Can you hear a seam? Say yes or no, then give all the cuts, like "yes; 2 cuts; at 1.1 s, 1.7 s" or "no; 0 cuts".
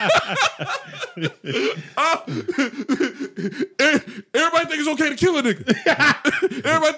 no; 0 cuts